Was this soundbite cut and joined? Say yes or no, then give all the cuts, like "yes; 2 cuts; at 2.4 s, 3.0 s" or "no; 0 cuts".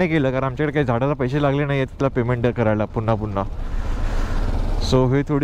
no; 0 cuts